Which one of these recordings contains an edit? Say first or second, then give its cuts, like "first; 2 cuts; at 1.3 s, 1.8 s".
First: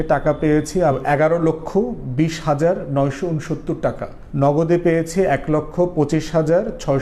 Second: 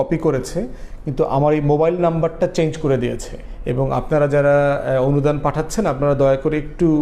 first; 1 cut; at 1.0 s